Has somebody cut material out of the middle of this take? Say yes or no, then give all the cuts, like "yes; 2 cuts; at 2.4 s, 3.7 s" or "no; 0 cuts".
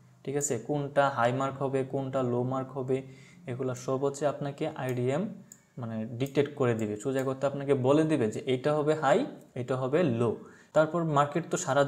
yes; 1 cut; at 10.5 s